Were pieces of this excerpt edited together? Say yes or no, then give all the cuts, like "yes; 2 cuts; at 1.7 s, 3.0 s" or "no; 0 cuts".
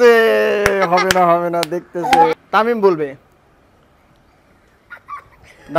yes; 1 cut; at 2.3 s